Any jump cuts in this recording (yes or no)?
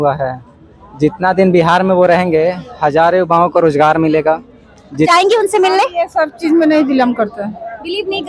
yes